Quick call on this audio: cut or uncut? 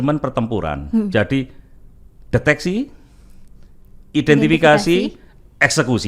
uncut